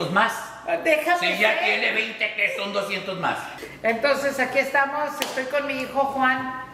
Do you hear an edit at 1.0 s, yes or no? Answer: no